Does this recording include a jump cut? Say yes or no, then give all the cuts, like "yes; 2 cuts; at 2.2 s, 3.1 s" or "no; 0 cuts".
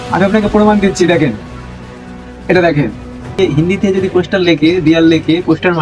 yes; 1 cut; at 3.4 s